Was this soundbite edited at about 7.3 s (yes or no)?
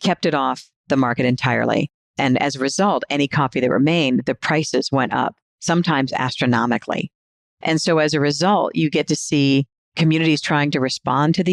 yes